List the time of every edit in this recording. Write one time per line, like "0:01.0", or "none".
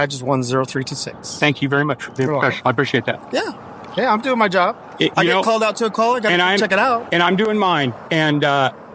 none